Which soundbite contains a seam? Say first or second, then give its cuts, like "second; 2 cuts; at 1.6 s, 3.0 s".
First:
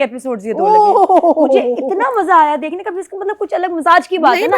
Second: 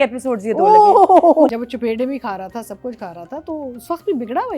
second; 1 cut; at 1.5 s